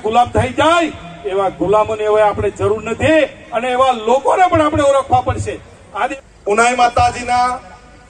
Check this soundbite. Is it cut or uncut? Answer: cut